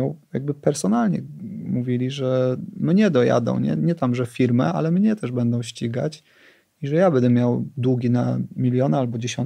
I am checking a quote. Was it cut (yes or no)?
no